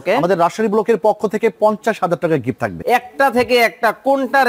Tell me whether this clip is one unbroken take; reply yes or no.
no